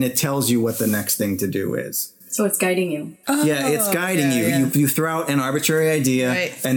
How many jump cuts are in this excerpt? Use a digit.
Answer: 1